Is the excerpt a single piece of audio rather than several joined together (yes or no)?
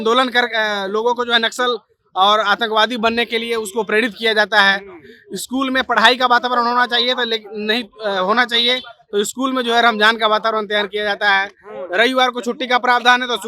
yes